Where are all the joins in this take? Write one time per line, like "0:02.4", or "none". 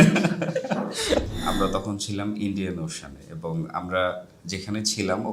0:01.3